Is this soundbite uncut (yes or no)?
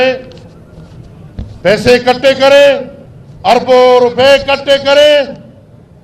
yes